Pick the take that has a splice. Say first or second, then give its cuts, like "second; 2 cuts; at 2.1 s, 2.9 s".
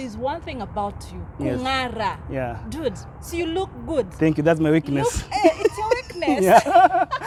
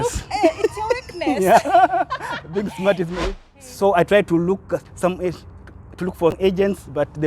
second; 2 cuts; at 3.2 s, 6.4 s